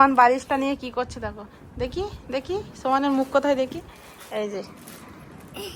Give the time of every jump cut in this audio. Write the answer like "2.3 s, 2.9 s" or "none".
none